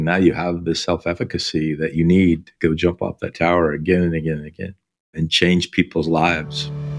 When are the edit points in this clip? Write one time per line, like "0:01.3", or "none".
none